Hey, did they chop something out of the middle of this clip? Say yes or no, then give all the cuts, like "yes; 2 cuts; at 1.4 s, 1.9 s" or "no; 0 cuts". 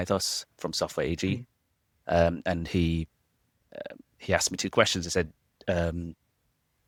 no; 0 cuts